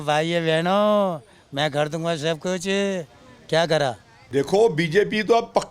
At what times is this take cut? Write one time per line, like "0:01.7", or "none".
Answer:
0:04.1